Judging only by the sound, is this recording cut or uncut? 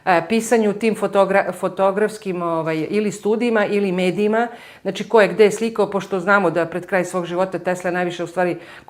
uncut